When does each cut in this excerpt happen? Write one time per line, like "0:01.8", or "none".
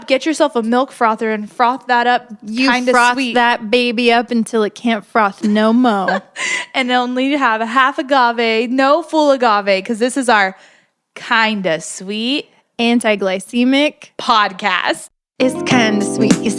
0:15.2